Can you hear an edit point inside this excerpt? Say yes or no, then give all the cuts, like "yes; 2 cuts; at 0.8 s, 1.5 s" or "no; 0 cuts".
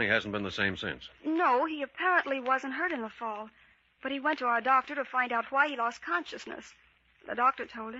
no; 0 cuts